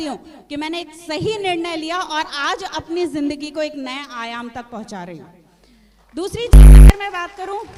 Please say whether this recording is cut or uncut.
uncut